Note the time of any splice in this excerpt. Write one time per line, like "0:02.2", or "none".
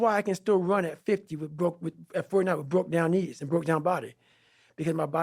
none